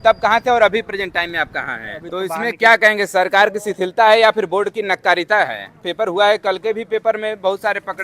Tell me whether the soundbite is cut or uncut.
cut